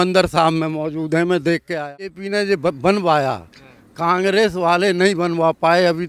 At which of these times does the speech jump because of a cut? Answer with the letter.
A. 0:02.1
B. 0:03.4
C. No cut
A